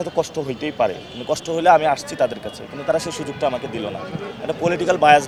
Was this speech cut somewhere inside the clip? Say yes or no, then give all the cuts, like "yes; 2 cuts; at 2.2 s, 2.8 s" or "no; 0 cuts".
no; 0 cuts